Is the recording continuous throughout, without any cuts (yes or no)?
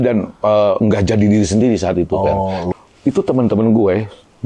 no